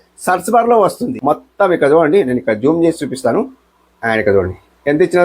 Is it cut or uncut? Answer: cut